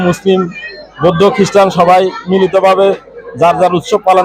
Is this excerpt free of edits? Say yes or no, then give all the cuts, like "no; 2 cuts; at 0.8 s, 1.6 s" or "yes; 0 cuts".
yes; 0 cuts